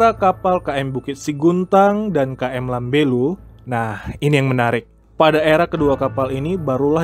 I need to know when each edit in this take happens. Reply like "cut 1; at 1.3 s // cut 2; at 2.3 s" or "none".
none